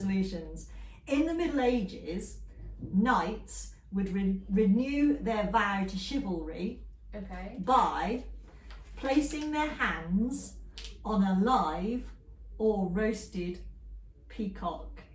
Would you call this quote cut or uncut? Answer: uncut